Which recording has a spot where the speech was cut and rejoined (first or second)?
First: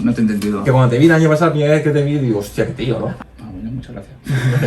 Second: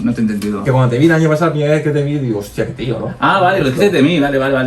first